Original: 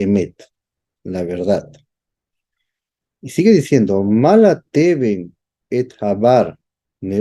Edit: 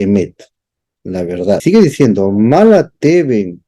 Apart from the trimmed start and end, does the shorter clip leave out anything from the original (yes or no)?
yes